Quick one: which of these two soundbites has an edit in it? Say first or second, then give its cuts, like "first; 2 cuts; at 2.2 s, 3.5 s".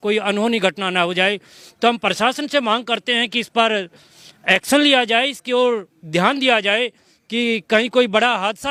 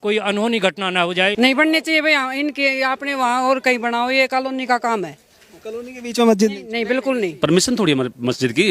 second; 2 cuts; at 1.3 s, 7.3 s